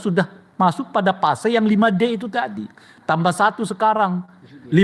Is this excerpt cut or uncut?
uncut